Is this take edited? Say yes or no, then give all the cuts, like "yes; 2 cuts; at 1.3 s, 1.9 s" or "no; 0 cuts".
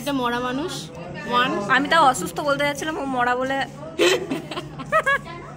no; 0 cuts